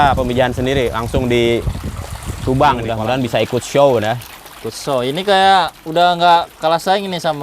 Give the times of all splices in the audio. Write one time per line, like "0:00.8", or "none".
0:03.0